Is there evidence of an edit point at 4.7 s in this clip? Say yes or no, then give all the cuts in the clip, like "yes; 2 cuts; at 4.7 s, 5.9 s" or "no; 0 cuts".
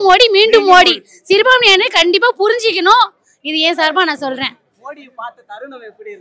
no; 0 cuts